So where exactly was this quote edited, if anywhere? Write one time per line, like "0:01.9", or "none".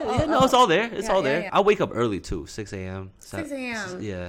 0:01.5